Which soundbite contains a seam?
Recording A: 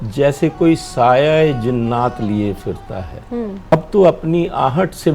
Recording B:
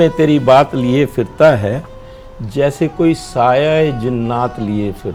A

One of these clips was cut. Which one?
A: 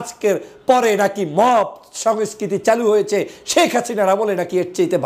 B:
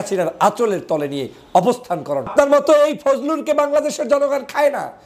B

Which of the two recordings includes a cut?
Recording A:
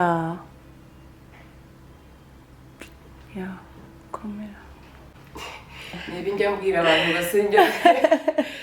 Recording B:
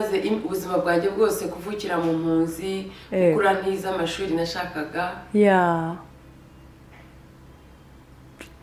A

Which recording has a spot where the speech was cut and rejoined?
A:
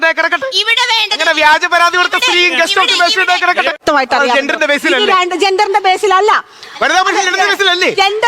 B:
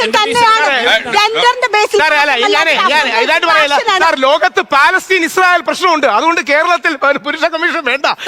A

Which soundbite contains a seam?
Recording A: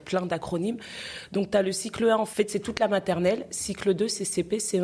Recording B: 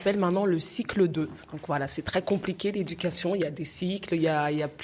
A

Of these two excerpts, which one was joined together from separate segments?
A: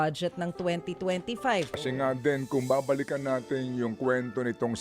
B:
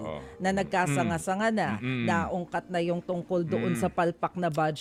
A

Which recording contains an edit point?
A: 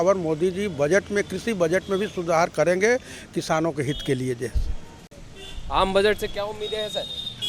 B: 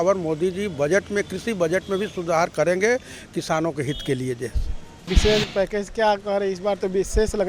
B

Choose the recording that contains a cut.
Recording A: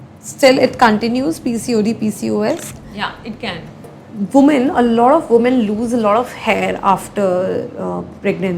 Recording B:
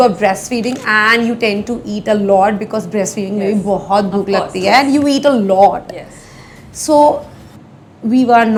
A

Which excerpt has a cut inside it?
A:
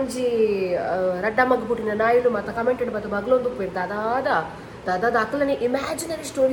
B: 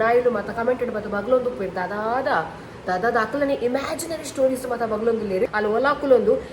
B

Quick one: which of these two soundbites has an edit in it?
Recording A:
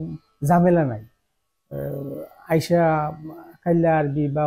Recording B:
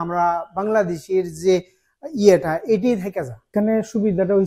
B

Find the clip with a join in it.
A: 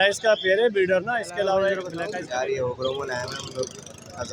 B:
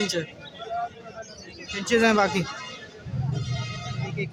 A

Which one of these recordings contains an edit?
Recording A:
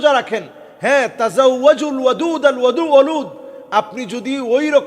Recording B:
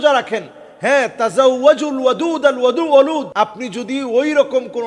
B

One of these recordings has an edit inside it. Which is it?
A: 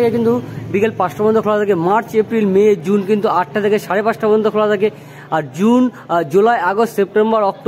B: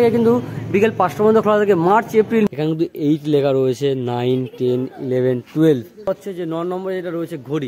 B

